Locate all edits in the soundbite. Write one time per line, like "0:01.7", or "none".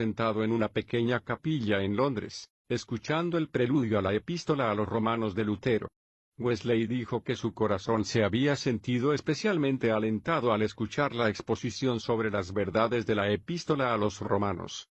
0:02.6